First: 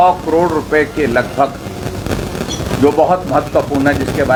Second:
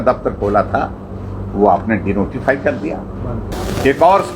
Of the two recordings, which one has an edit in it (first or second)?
second